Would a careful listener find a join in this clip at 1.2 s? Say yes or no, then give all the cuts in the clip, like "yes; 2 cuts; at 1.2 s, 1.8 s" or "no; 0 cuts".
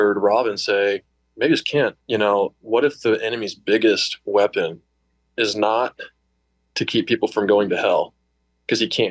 yes; 2 cuts; at 1.2 s, 2.0 s